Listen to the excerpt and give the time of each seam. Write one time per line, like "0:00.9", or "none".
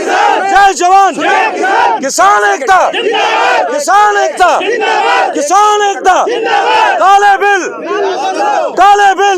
none

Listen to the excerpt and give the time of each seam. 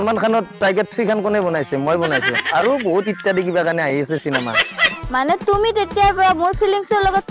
0:05.0

